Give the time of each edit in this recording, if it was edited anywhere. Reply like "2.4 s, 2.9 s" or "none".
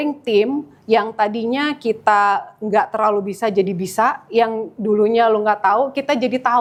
none